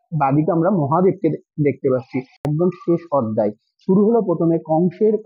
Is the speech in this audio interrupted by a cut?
yes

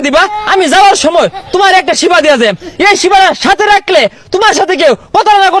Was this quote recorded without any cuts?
yes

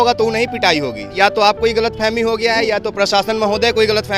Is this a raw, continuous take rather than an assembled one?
no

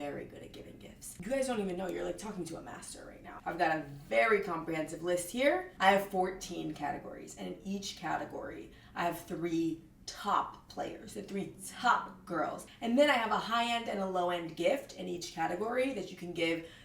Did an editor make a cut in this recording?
yes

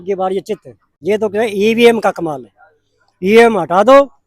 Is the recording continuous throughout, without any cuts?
no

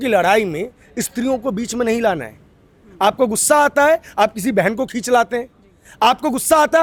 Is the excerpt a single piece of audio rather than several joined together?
yes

